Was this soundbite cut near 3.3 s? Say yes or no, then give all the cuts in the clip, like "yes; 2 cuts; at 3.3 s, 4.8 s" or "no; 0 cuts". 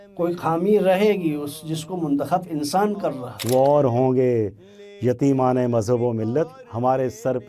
yes; 1 cut; at 3.3 s